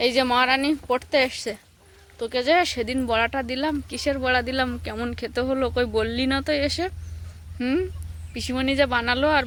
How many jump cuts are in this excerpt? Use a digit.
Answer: 0